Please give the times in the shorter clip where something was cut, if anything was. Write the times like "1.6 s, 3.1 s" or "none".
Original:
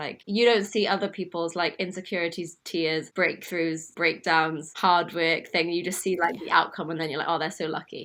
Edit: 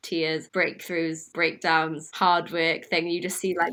none